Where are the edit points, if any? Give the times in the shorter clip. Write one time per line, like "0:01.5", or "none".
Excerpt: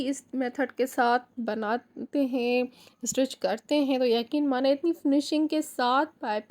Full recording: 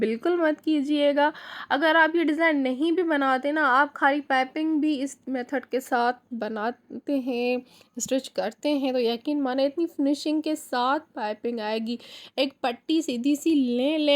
none